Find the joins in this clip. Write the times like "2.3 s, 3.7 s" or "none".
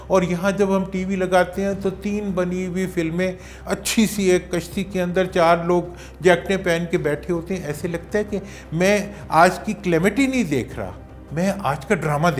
none